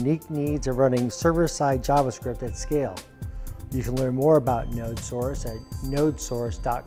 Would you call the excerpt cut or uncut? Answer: uncut